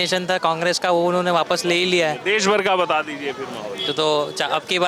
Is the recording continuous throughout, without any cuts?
yes; 0 cuts

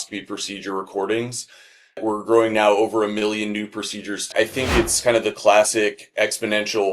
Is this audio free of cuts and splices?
no; 1 cut; at 4.3 s

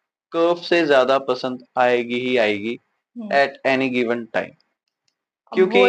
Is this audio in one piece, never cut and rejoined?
yes; 0 cuts

